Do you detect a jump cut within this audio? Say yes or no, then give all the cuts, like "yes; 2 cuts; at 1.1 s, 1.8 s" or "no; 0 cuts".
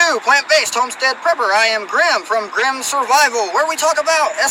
no; 0 cuts